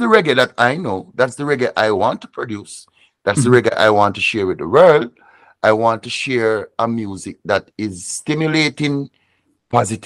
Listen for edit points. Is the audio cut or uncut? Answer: uncut